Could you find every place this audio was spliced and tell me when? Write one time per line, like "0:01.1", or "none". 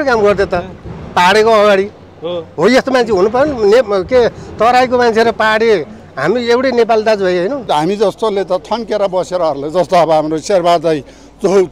0:07.7